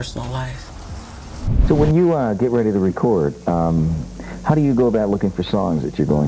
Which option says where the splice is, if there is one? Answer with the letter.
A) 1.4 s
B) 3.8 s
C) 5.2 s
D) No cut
A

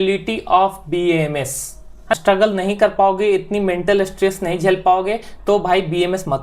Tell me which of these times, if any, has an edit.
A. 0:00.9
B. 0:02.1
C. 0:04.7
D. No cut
B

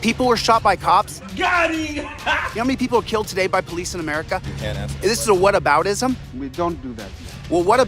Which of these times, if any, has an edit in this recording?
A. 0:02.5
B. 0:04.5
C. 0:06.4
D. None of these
A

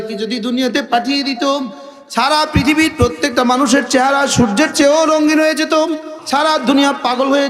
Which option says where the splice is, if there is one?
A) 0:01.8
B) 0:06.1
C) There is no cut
B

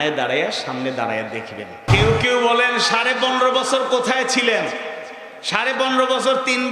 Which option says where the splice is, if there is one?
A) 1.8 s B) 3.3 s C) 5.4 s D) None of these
A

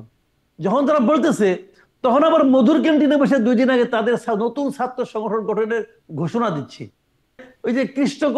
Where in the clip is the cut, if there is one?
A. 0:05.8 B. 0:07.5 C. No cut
B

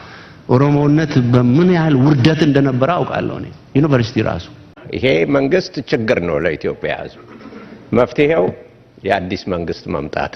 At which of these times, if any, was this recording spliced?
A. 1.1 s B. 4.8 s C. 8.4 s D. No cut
B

